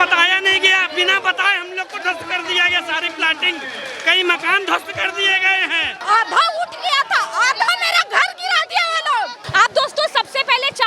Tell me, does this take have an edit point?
yes; 2 cuts; at 5.9 s, 9.4 s

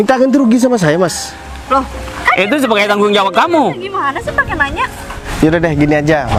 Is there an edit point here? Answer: no; 0 cuts

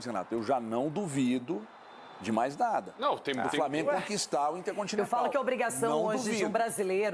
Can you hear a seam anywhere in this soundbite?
no; 0 cuts

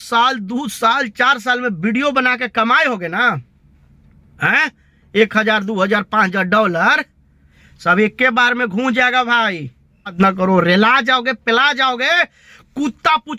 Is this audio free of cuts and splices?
no; 1 cut; at 10.1 s

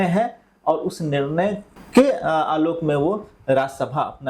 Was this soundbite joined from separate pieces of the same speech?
yes; 1 cut; at 1.7 s

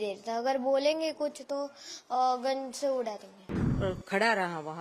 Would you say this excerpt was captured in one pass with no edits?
no; 1 cut; at 3.6 s

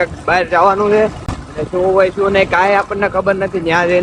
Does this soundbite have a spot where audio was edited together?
no; 0 cuts

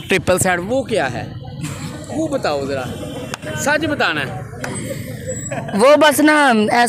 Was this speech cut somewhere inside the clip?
no; 0 cuts

